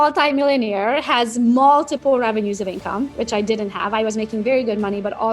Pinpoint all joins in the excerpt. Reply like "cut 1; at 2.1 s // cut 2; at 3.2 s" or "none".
cut 1; at 3.2 s